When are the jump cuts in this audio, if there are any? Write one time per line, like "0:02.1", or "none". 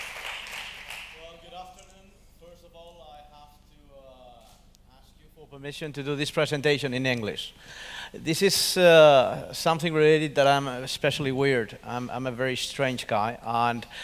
0:11.5